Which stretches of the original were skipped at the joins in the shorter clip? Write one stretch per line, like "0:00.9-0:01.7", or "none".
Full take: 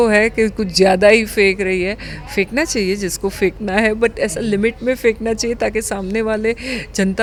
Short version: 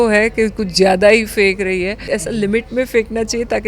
0:02.0-0:04.1